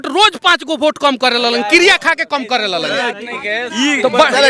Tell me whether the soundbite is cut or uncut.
uncut